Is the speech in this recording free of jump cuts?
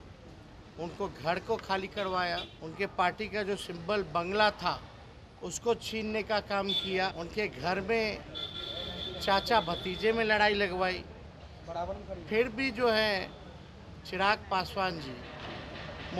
no; 2 cuts; at 2.6 s, 7.1 s

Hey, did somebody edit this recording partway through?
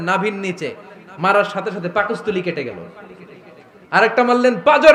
no; 0 cuts

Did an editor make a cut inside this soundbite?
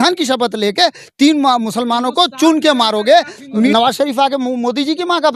yes; 1 cut; at 3.7 s

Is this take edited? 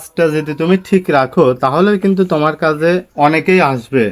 yes; 1 cut; at 3.1 s

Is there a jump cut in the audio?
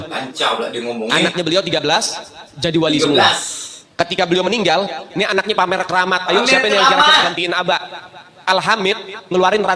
no; 0 cuts

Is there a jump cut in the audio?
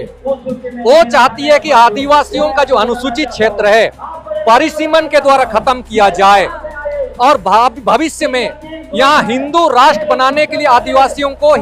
no; 0 cuts

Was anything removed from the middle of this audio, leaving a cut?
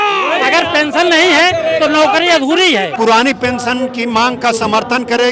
yes; 1 cut; at 2.9 s

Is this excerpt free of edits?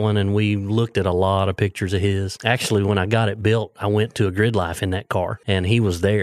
no; 2 cuts; at 2.3 s, 5.4 s

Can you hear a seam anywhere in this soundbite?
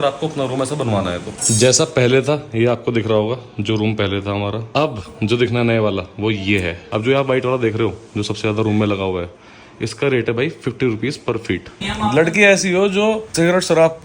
yes; 4 cuts; at 1.3 s, 4.6 s, 6.8 s, 11.8 s

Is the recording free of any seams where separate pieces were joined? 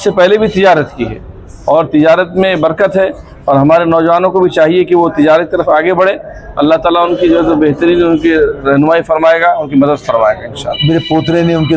no; 1 cut; at 10.7 s

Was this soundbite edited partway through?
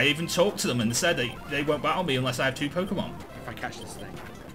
no; 0 cuts

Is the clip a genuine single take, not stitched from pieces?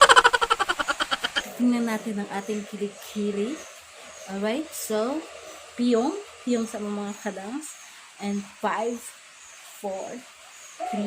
no; 1 cut; at 1.0 s

